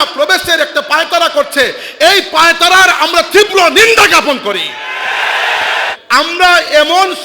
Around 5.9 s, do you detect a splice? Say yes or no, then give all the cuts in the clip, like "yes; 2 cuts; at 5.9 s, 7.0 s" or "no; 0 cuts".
yes; 1 cut; at 5.9 s